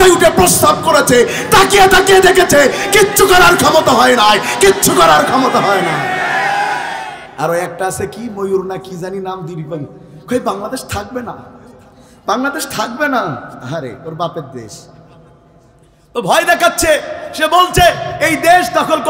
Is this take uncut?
no; 1 cut; at 7.2 s

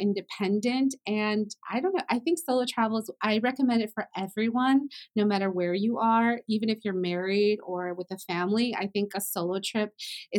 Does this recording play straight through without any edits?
yes; 0 cuts

